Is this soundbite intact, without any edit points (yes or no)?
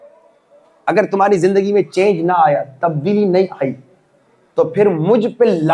yes